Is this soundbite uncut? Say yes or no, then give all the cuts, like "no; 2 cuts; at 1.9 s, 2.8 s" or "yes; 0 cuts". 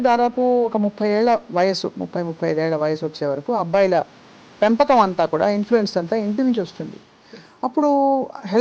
yes; 0 cuts